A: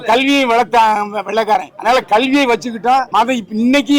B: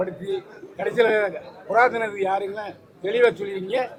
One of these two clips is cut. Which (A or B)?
A